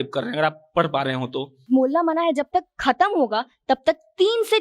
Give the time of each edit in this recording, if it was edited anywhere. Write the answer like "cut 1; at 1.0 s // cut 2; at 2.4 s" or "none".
cut 1; at 1.6 s